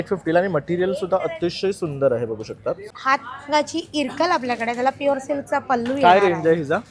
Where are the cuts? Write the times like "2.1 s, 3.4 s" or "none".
2.9 s